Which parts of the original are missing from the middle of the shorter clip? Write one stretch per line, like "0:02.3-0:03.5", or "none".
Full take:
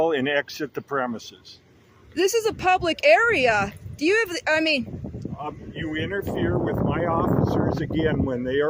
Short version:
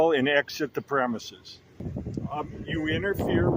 0:01.9-0:05.0